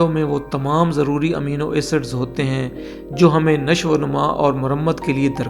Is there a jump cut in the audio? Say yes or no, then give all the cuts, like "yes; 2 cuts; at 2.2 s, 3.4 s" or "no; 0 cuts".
no; 0 cuts